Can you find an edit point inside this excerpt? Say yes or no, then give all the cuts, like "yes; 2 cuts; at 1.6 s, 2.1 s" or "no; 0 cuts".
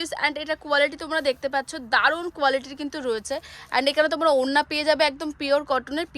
no; 0 cuts